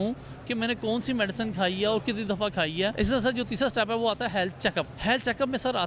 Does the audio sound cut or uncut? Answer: cut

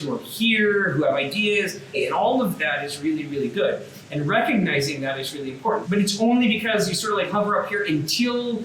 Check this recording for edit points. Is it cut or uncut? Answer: cut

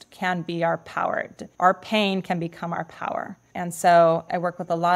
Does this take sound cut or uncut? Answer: cut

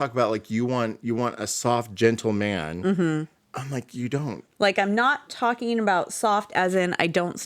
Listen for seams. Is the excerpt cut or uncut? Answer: cut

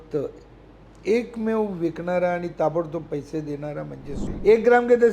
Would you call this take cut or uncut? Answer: cut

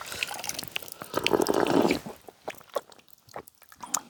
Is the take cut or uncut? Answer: uncut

